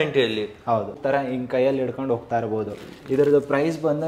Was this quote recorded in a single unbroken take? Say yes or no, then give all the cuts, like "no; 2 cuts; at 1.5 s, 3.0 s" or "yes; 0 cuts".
no; 1 cut; at 0.9 s